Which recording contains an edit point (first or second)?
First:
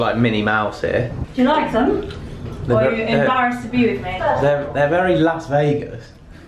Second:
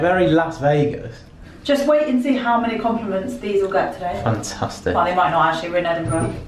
first